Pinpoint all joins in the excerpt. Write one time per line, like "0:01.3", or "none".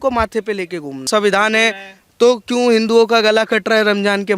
0:01.1